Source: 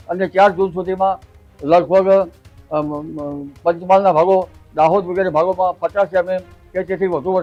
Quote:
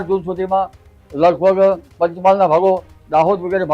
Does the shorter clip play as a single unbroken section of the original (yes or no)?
no